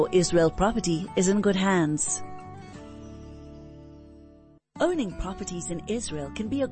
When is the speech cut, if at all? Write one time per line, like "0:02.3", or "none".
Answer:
0:02.0
0:04.5